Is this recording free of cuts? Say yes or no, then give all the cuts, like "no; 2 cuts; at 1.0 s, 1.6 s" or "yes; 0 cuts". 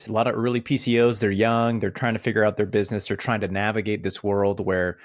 yes; 0 cuts